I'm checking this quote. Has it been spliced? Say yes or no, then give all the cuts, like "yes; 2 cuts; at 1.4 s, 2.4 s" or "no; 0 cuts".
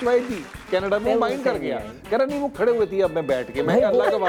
no; 0 cuts